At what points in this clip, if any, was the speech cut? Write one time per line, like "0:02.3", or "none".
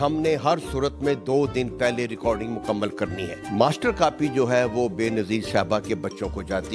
none